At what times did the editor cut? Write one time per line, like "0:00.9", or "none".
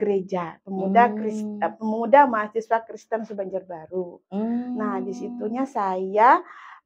none